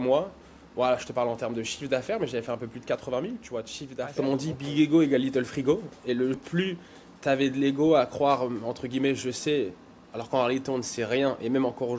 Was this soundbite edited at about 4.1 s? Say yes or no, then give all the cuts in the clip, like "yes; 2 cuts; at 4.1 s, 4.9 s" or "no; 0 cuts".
yes; 2 cuts; at 4.1 s, 6.4 s